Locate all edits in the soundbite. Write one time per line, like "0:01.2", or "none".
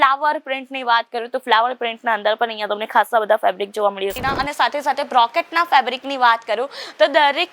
0:04.2